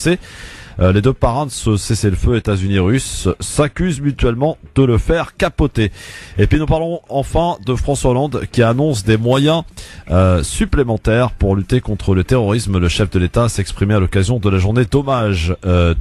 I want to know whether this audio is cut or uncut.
cut